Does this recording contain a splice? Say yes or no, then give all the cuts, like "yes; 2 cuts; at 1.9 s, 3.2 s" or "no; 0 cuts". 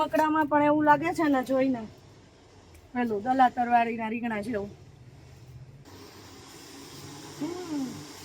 yes; 1 cut; at 5.8 s